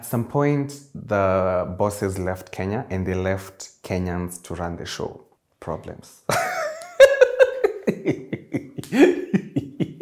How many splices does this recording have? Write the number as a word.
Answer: zero